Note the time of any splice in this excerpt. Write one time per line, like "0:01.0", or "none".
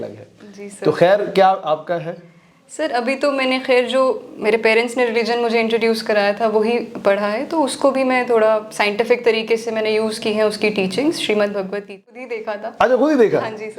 0:12.4